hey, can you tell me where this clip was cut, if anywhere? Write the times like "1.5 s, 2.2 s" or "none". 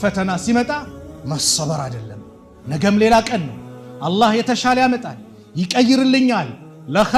none

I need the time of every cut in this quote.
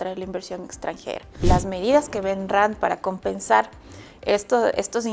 1.4 s

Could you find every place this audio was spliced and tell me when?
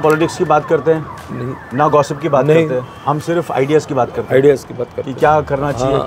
none

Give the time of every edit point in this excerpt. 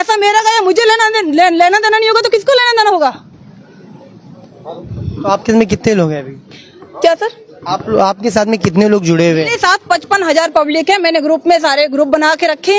none

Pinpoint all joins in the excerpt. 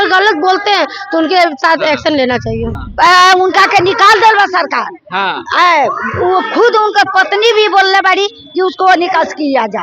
2.8 s

